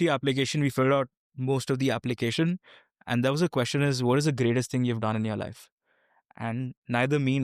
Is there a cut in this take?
no; 0 cuts

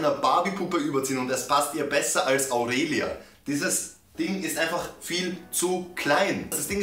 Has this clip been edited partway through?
no; 0 cuts

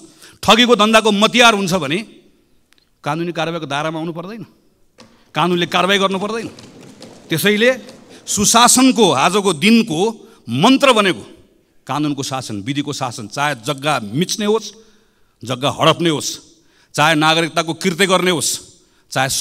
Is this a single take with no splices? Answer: yes; 0 cuts

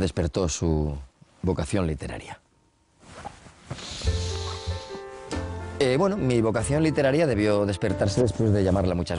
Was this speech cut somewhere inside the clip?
no; 0 cuts

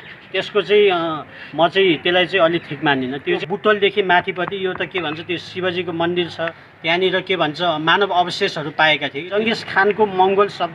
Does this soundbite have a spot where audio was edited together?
yes; 3 cuts; at 3.4 s, 6.7 s, 9.3 s

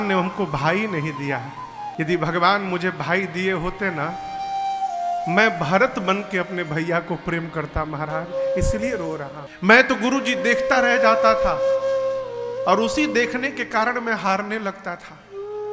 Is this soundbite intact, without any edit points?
no; 2 cuts; at 1.9 s, 9.4 s

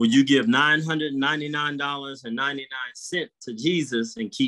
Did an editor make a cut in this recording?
no; 0 cuts

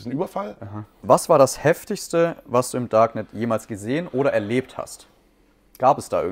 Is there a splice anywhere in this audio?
yes; 1 cut; at 1.0 s

